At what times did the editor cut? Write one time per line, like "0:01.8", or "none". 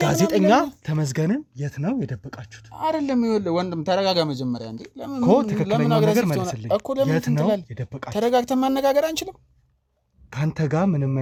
none